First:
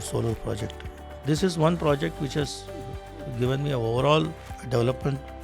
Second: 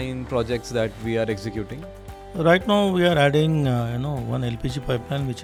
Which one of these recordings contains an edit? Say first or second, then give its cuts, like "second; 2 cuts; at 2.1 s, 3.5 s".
first; 2 cuts; at 1.2 s, 4.5 s